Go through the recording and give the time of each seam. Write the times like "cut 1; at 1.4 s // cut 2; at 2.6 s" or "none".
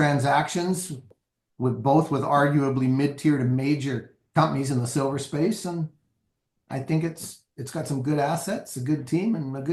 cut 1; at 1.1 s